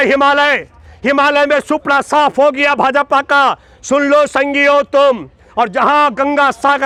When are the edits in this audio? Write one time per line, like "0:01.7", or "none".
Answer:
none